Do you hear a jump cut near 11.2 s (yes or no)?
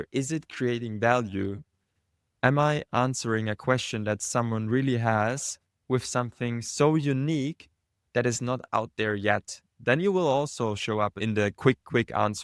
yes